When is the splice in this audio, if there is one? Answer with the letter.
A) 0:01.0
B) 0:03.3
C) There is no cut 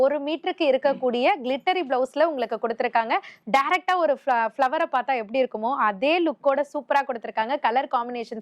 B